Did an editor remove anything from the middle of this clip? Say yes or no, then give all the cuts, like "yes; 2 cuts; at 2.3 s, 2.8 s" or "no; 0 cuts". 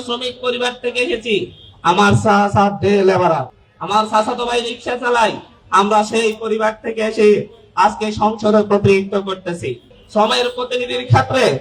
no; 0 cuts